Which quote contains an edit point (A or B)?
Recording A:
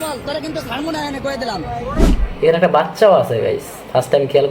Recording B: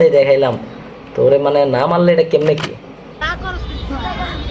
A